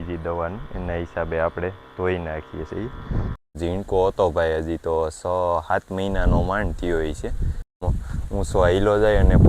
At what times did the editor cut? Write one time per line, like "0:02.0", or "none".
0:03.5
0:07.9